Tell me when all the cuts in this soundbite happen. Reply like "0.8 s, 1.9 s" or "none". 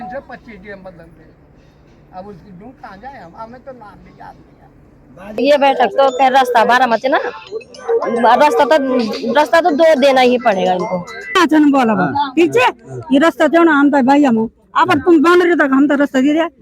5.3 s, 11.4 s